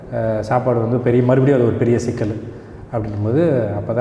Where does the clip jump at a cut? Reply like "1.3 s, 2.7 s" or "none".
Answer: none